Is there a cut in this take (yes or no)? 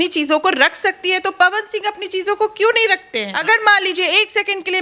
yes